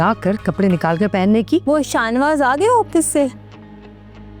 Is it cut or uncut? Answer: cut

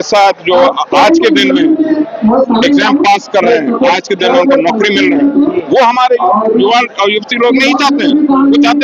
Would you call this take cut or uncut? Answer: uncut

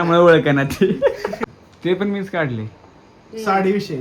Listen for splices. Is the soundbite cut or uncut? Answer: cut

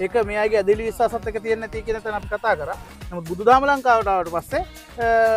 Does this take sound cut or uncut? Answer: uncut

